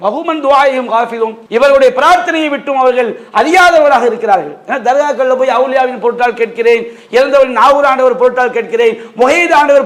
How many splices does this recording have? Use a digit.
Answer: 1